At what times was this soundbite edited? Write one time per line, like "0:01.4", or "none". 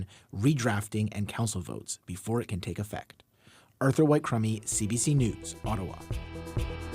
0:05.9